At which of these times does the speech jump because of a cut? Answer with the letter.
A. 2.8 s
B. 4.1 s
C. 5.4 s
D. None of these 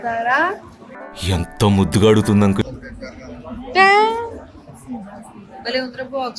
A